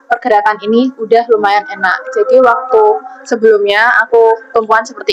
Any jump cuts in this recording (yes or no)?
no